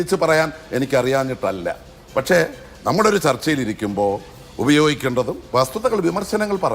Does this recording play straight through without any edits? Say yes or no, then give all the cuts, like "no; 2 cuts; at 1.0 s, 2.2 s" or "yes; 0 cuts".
yes; 0 cuts